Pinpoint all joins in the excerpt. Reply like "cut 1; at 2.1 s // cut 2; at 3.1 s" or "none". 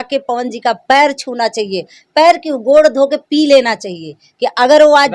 none